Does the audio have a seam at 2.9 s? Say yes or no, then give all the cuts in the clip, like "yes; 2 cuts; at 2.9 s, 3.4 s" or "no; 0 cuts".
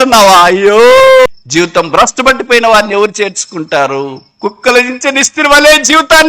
no; 1 cut; at 1.3 s